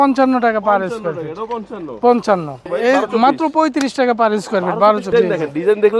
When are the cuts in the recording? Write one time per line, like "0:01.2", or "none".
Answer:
0:02.7
0:05.0